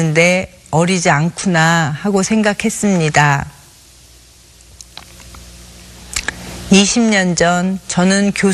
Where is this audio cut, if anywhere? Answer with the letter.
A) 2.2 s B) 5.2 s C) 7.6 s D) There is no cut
C